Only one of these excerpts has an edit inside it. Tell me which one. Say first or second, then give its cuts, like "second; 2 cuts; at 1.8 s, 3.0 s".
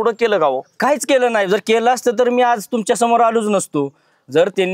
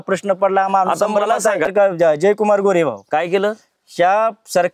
second; 1 cut; at 1.7 s